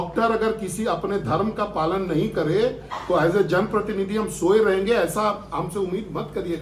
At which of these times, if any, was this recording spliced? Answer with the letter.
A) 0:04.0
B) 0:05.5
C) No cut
C